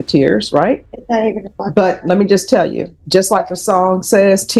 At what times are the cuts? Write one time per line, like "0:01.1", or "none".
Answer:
0:00.9
0:02.9